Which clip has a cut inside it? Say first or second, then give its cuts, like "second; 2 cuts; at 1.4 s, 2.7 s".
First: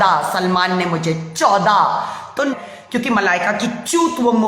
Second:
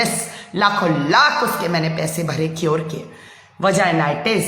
first; 1 cut; at 2.5 s